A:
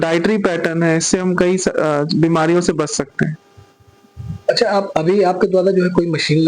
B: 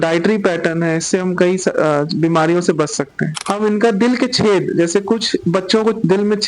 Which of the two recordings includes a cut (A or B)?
B